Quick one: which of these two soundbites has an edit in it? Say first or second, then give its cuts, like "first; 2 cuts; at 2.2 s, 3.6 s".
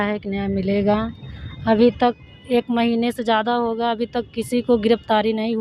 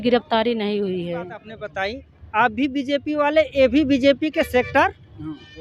second; 1 cut; at 1.6 s